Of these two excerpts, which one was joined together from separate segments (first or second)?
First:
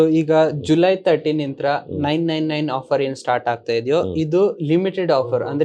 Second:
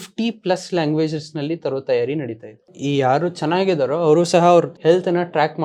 second